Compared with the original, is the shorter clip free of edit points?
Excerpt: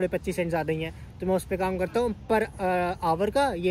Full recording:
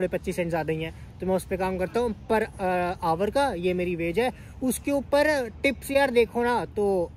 yes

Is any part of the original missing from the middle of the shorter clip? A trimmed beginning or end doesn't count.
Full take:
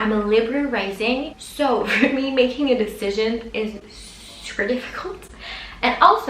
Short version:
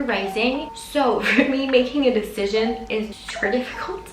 yes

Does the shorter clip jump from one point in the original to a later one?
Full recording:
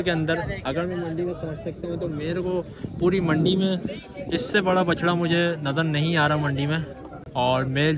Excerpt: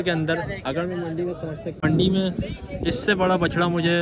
yes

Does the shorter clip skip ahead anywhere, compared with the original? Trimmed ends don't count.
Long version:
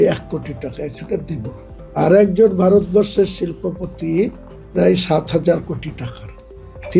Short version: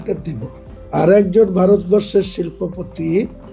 no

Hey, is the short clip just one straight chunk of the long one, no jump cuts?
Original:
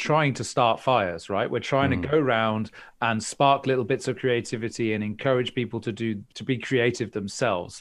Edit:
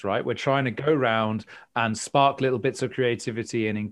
yes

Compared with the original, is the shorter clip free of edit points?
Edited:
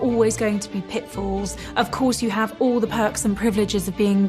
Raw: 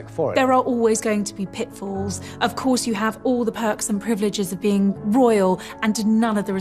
yes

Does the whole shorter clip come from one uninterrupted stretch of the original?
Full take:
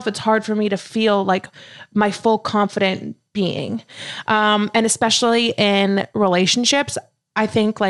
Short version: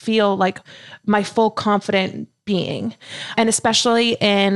no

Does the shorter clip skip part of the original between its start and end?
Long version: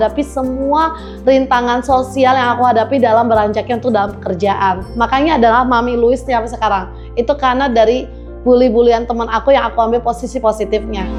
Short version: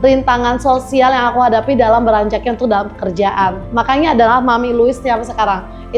no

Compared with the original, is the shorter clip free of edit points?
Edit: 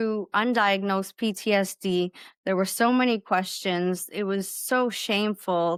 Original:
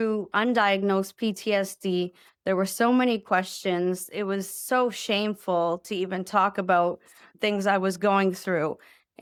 yes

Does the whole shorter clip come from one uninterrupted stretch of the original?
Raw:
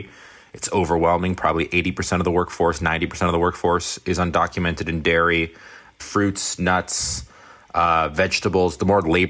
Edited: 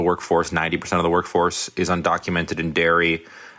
yes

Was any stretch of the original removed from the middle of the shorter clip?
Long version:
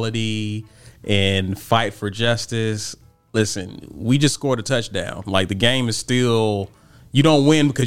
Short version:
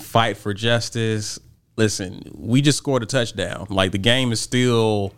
no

